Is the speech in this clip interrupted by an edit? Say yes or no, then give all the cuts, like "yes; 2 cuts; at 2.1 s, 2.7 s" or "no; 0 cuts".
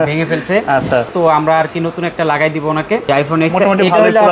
yes; 2 cuts; at 1.1 s, 3.1 s